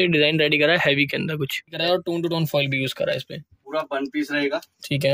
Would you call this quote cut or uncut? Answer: cut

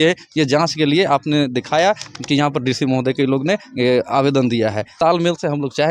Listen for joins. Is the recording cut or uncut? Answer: cut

